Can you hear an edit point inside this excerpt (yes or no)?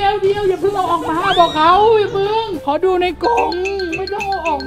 no